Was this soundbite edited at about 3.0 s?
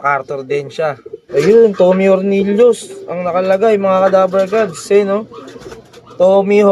no; 1 cut; at 1.2 s

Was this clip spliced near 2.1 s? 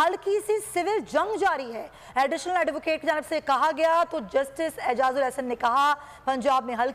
no; 0 cuts

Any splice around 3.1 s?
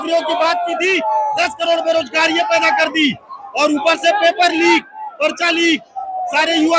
no; 0 cuts

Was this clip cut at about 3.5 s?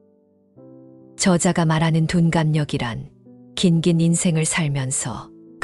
no; 1 cut; at 1.2 s

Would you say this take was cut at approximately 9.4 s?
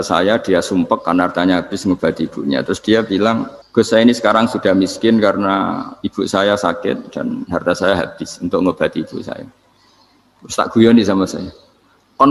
no; 1 cut; at 3.6 s

